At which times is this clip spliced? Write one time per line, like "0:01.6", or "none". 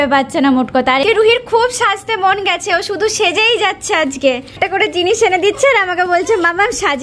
0:01.0
0:04.5